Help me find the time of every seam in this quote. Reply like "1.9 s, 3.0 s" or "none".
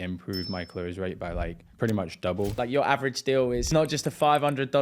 1.6 s, 2.6 s, 3.7 s